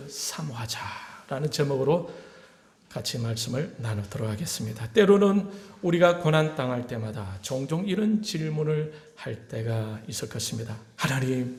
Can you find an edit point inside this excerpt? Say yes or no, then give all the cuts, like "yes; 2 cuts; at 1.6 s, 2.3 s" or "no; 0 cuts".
no; 0 cuts